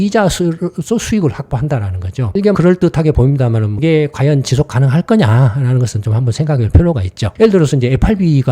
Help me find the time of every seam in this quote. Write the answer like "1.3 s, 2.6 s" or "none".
3.7 s, 7.2 s